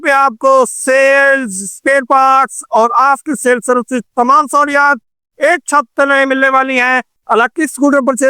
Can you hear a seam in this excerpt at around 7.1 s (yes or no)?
yes